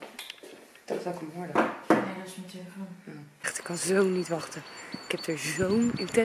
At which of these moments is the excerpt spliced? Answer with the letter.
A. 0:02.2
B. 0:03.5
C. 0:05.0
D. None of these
B